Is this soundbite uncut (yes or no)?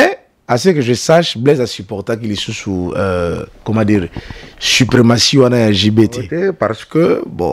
no